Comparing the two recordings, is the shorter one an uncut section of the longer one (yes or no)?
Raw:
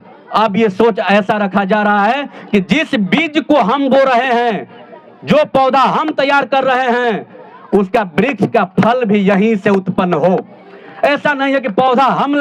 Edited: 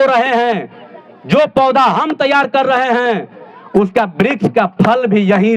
yes